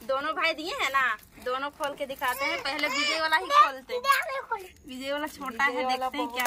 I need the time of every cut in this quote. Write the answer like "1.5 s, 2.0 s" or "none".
4.8 s